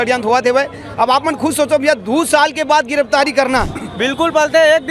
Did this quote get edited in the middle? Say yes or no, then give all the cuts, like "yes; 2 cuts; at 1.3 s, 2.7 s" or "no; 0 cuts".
yes; 1 cut; at 3.8 s